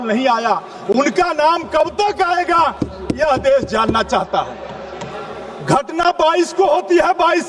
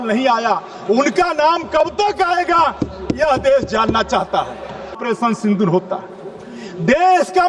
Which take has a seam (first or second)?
second